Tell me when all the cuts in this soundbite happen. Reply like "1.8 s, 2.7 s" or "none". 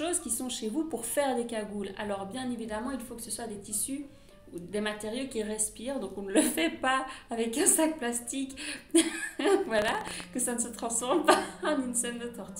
none